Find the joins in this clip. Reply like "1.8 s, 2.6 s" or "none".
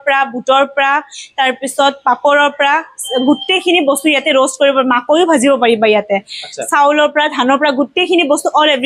none